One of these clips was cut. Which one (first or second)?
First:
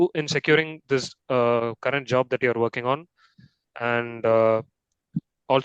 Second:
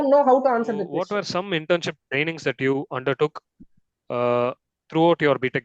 second